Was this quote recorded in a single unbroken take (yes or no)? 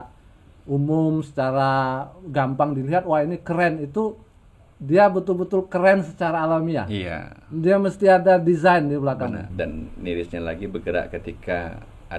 no